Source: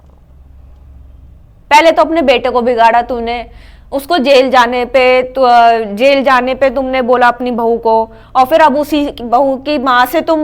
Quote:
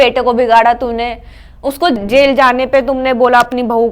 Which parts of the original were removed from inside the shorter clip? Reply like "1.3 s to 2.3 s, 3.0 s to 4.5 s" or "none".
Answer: 4.2 s to 5.8 s